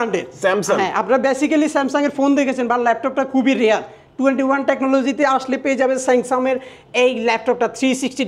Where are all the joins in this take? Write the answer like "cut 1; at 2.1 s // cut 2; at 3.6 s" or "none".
none